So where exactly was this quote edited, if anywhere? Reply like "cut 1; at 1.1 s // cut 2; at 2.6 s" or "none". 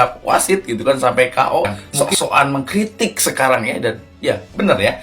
cut 1; at 1.8 s

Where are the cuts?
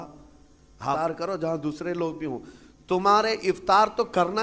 cut 1; at 1.0 s

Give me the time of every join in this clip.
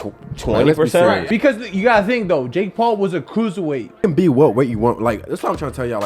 cut 1; at 1.2 s // cut 2; at 4.0 s

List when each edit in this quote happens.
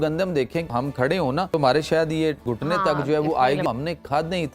cut 1; at 1.1 s // cut 2; at 2.5 s // cut 3; at 3.6 s

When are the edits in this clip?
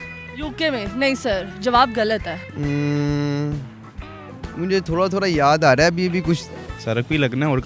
cut 1; at 2.4 s // cut 2; at 6.7 s

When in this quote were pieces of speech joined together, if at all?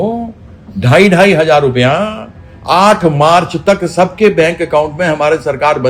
none

